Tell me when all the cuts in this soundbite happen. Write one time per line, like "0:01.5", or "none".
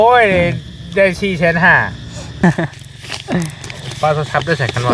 0:02.4